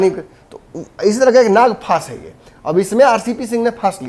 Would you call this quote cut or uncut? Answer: uncut